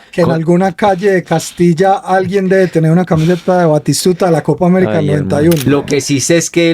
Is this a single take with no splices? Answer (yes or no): no